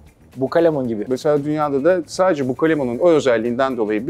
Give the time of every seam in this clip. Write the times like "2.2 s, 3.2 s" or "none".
1.0 s

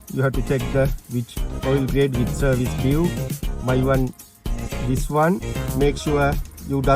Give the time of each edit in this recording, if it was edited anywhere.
5.5 s

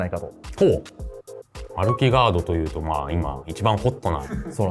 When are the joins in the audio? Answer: none

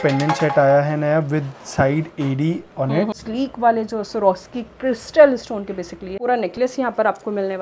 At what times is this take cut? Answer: 3.2 s, 6.2 s

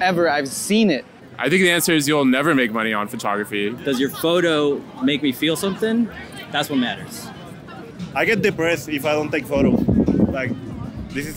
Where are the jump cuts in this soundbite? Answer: 1.1 s, 3.8 s, 7.9 s

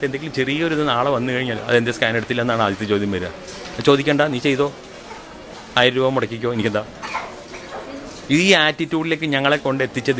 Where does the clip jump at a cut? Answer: none

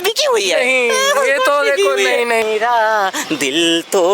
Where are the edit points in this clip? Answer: 2.4 s

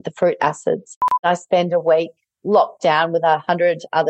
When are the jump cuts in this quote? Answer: 1.2 s

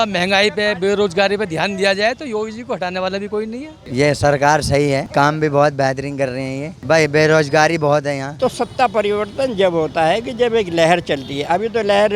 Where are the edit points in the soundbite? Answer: 3.8 s, 8.3 s

